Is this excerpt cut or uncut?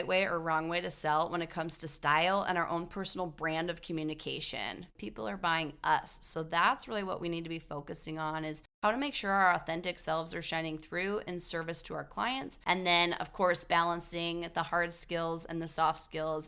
cut